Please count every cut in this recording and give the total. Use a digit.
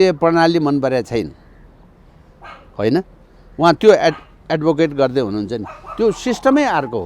0